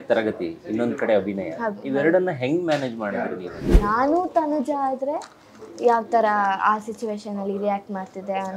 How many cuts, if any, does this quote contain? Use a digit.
1